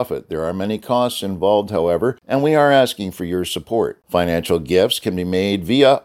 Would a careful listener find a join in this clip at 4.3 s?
no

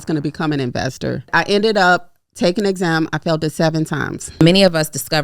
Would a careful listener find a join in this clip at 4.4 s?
yes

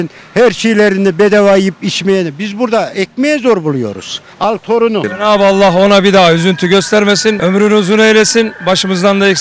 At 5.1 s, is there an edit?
yes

